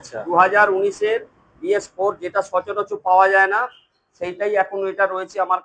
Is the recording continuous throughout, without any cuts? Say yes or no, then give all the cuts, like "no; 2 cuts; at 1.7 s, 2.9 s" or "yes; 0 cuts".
yes; 0 cuts